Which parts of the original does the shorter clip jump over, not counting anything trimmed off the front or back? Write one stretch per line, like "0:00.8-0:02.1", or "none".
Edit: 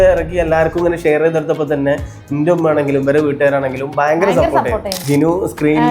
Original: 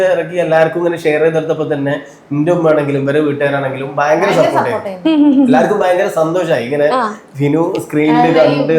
0:04.9-0:07.2